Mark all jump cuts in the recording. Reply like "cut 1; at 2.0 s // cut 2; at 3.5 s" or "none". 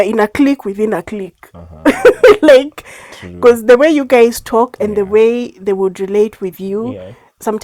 none